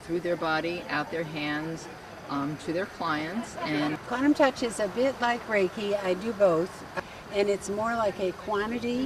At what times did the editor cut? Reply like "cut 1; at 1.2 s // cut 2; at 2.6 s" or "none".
cut 1; at 4.0 s // cut 2; at 6.9 s